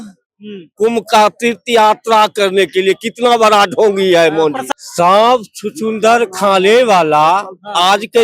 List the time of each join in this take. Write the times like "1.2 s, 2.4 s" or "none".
4.6 s